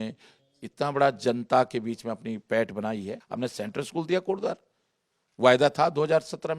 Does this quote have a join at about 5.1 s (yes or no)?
no